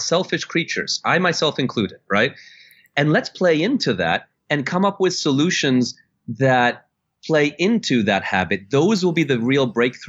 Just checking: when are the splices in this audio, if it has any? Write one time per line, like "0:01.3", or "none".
none